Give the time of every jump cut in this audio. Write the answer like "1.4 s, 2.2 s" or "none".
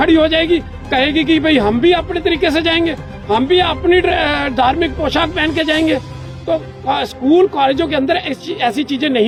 none